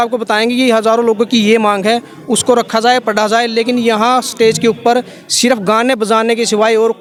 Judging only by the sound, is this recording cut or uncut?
uncut